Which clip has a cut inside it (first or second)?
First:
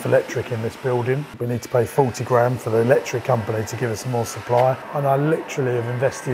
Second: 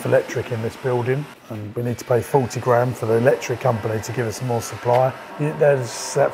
first